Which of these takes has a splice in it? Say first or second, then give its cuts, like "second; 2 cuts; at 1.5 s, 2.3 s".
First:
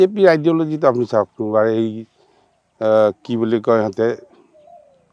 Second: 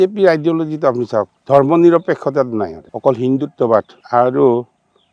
second; 3 cuts; at 1.3 s, 2.8 s, 4.0 s